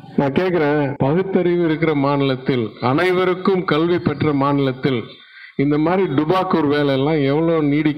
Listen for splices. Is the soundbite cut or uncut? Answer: uncut